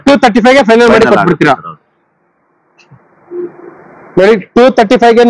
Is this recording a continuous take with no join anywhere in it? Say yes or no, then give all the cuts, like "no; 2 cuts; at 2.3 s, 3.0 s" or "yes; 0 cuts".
yes; 0 cuts